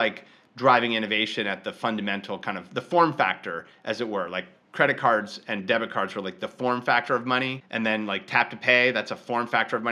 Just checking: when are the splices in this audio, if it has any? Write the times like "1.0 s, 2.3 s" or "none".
none

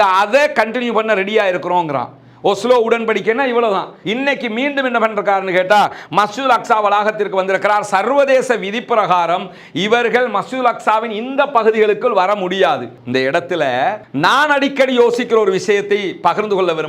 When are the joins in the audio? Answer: 4.0 s, 13.0 s

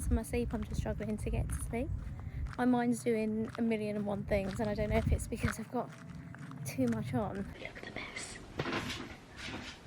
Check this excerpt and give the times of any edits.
7.6 s

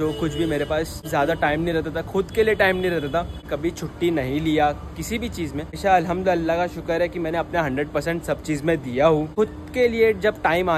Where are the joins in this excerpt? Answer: 1.0 s, 3.5 s, 5.8 s, 9.3 s

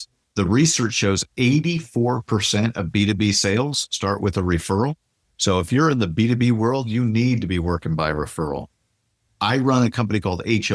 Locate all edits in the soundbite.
none

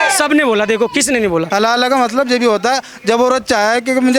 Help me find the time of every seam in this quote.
1.5 s

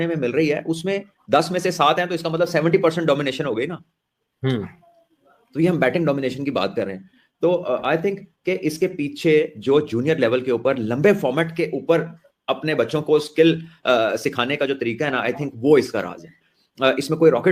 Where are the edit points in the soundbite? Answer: none

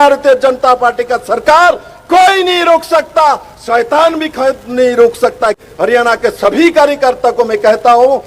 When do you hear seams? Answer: 5.6 s

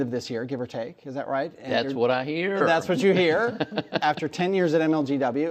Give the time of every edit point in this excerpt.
4.0 s

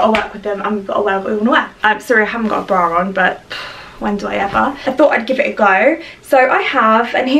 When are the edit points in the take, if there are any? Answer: 1.7 s, 4.8 s

